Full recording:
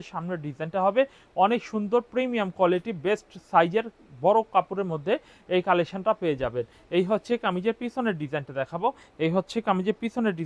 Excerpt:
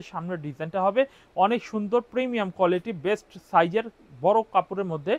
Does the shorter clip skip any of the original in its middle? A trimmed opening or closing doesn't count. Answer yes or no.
no